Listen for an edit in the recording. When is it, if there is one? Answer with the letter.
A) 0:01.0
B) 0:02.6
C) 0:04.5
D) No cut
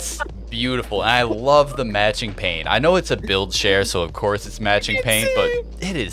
D